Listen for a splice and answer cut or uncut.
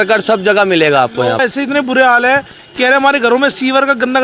cut